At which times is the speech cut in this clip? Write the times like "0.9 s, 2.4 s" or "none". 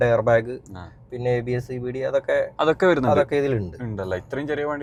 none

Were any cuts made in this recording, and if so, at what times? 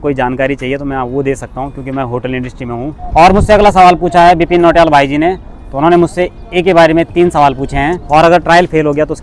3.0 s, 8.0 s

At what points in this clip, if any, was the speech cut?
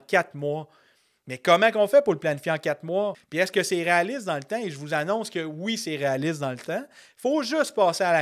3.2 s

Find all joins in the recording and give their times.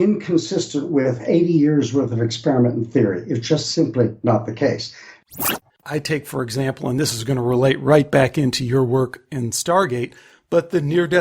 5.2 s

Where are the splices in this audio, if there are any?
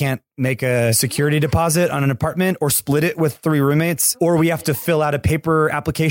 1.2 s, 4.1 s

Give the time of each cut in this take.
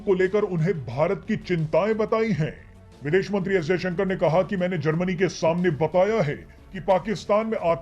none

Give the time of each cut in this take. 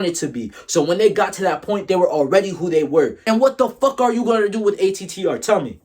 3.2 s

